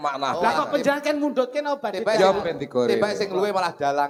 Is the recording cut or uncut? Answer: uncut